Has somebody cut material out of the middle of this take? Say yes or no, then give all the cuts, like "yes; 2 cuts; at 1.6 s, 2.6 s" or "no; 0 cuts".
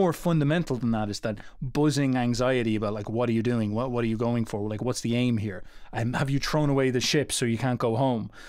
no; 0 cuts